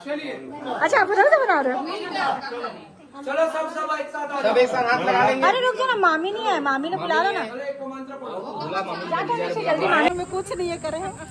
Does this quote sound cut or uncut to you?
cut